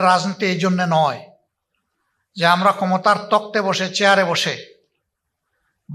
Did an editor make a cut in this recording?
no; 0 cuts

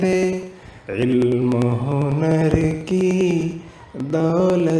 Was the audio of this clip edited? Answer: no; 0 cuts

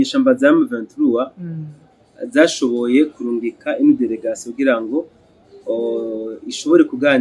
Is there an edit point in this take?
no; 0 cuts

